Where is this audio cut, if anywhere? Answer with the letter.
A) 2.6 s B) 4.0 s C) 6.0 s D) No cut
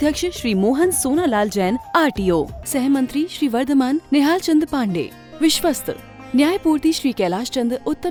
D